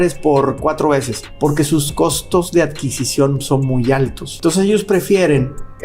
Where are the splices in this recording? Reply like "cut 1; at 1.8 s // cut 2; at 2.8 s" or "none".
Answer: cut 1; at 1.2 s // cut 2; at 4.2 s